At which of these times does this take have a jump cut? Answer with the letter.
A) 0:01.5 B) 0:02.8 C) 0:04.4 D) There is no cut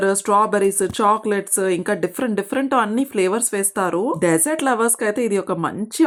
D